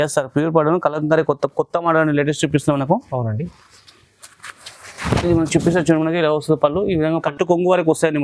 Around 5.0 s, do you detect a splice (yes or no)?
no